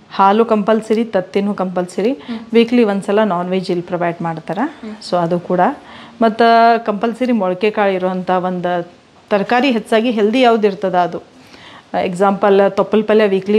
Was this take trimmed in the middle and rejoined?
no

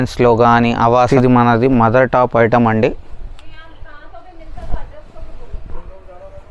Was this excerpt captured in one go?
no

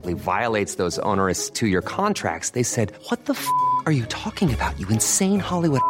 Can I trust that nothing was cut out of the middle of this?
yes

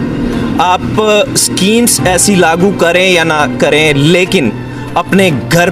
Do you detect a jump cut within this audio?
no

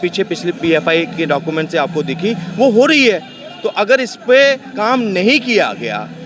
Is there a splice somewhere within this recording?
no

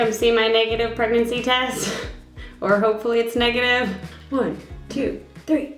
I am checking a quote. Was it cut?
yes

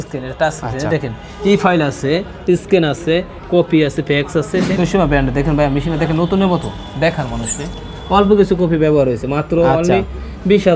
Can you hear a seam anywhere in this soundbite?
yes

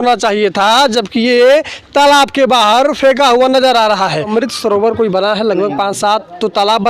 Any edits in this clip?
yes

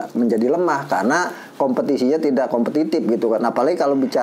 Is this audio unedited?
yes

